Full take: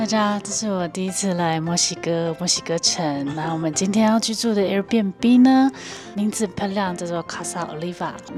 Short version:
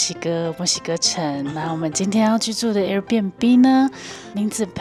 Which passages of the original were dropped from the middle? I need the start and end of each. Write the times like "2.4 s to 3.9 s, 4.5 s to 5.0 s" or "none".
none

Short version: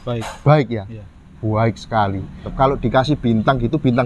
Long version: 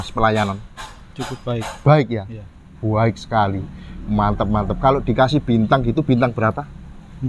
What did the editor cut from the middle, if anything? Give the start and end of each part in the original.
3.9 s to 4.7 s

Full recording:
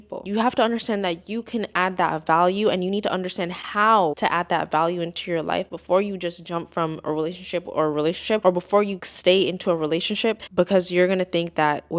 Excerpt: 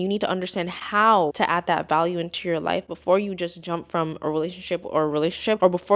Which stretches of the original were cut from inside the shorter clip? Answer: none

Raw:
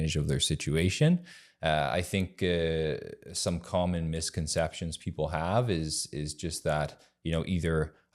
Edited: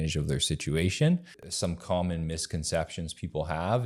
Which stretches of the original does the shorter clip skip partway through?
1.4 s to 3.2 s

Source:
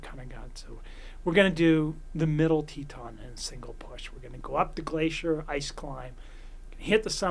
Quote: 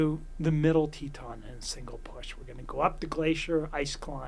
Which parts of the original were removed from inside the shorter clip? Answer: none

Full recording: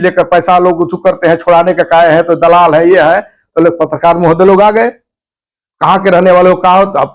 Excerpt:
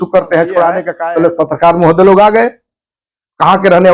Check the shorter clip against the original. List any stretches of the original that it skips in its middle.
1.8 s to 3.3 s

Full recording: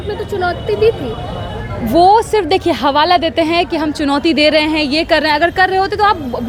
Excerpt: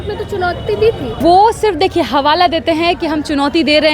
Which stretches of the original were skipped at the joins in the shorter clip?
1.2 s to 1.9 s

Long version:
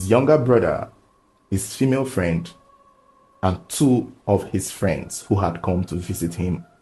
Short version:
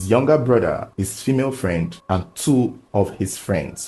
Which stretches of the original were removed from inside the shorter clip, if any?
0.9 s to 1.4 s, 2.5 s to 3.3 s

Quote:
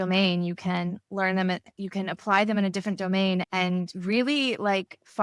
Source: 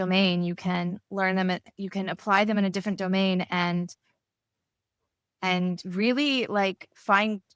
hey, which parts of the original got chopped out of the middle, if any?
3.5 s to 5.4 s

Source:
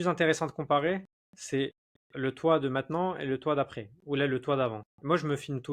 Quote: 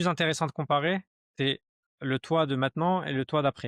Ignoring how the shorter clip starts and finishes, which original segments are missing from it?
1.2 s to 1.3 s

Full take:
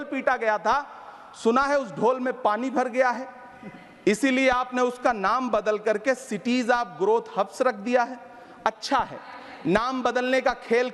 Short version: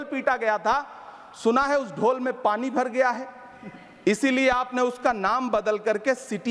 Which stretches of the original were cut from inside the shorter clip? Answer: none

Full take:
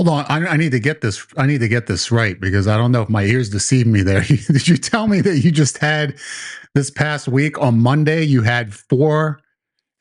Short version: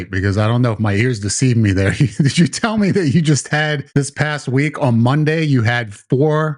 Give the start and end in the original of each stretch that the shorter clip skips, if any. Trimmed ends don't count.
6.1 s to 6.6 s

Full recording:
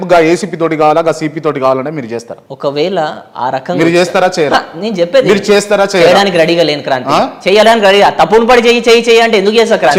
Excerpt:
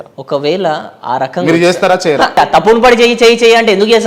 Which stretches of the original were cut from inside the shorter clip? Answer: 4.7 s to 8.0 s

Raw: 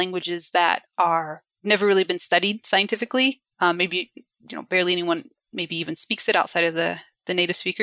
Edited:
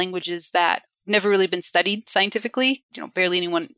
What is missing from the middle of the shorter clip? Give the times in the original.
0.9 s to 1.4 s, 3.5 s to 4.4 s

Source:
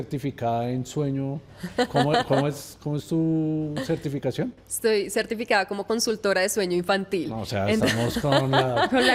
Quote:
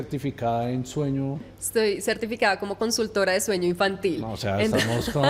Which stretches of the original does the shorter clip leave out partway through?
1.6 s to 4.6 s

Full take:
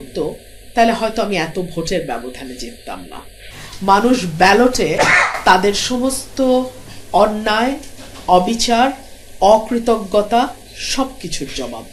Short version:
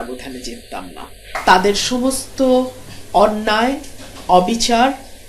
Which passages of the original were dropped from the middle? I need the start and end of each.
3.5 s to 5.3 s

